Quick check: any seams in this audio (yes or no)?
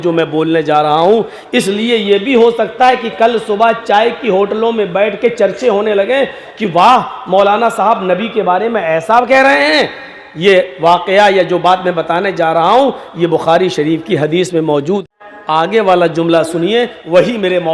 yes